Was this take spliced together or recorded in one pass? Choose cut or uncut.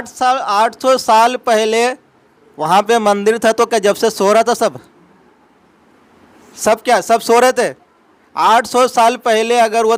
uncut